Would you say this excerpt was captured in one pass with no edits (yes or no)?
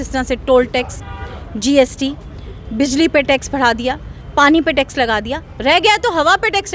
yes